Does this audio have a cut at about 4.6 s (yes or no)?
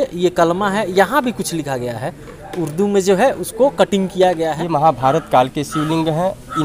yes